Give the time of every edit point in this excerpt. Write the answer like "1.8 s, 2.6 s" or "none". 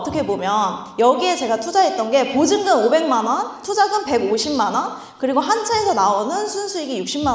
none